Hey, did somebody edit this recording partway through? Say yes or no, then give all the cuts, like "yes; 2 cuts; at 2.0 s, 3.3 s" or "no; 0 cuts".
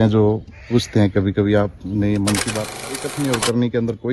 yes; 1 cut; at 3.1 s